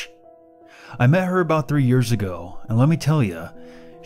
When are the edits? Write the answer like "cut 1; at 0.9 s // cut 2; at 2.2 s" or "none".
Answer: cut 1; at 2.3 s